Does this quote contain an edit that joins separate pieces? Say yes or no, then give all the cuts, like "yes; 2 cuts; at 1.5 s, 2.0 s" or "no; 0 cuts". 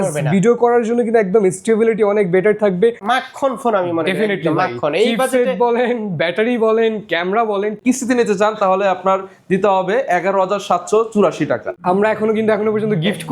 yes; 3 cuts; at 3.0 s, 7.8 s, 11.8 s